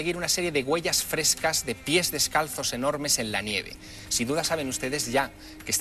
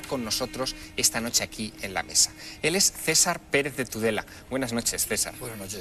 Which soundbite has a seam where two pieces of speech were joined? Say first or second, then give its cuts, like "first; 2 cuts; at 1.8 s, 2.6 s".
first; 1 cut; at 0.9 s